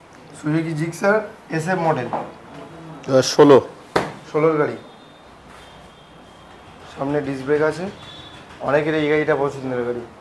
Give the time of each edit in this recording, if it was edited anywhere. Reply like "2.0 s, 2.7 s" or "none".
none